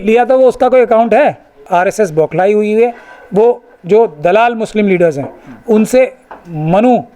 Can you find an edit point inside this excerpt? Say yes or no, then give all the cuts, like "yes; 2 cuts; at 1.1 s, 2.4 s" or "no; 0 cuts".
yes; 1 cut; at 1.6 s